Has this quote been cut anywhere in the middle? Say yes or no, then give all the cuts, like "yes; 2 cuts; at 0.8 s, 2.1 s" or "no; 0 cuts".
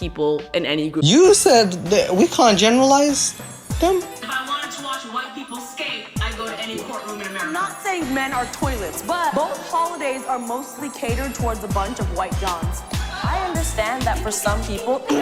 yes; 1 cut; at 1.0 s